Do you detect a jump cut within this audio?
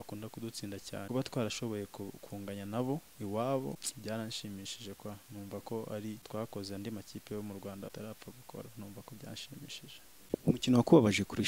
yes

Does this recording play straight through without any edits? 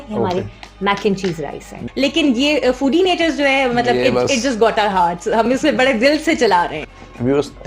no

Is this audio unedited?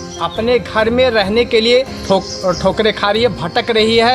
no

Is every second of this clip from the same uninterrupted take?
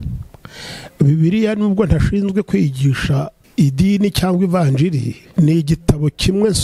no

